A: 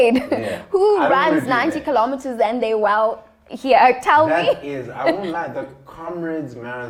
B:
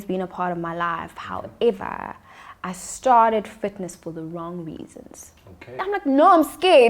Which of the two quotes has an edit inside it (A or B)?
B